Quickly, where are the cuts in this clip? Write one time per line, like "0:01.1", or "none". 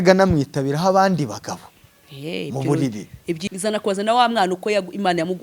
0:03.4